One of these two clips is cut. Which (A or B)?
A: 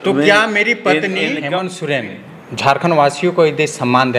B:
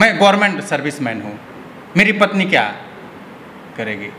A